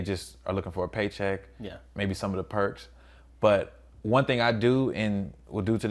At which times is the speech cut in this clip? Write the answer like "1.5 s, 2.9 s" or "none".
none